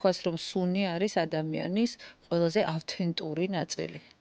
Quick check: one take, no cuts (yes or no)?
yes